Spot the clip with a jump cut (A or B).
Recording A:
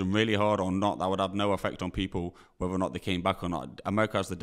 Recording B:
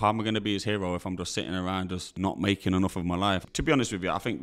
B